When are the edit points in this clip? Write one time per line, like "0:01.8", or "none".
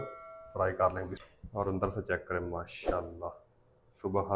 0:01.2